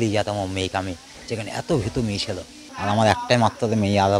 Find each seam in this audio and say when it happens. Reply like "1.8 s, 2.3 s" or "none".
2.7 s